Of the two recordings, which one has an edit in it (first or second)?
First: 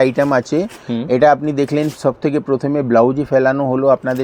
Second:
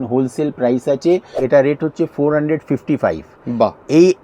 second